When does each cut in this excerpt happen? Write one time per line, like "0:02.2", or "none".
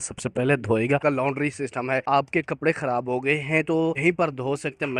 0:01.0
0:02.0
0:04.0